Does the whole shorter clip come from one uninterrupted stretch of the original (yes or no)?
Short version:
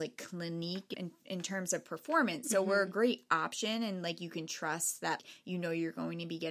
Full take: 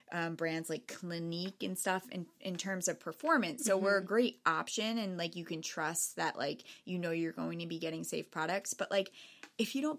no